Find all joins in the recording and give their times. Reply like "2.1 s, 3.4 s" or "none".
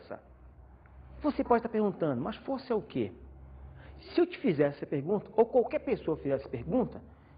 6.2 s

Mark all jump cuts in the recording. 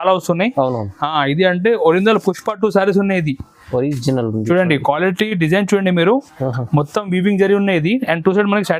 none

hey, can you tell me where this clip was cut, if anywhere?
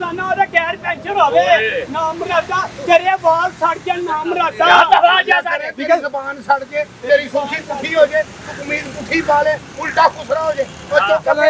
none

